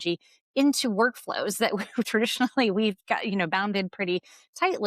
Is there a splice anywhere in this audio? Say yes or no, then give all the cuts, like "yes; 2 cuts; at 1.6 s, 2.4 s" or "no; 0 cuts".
no; 0 cuts